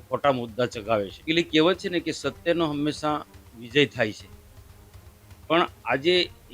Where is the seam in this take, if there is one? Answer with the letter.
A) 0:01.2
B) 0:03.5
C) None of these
A